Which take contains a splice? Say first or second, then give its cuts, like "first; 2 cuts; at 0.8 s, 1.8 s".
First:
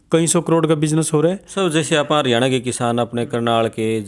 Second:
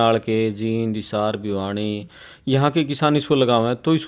first; 1 cut; at 1.5 s